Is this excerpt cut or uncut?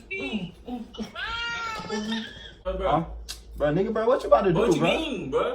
cut